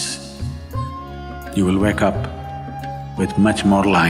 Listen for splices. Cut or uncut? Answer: cut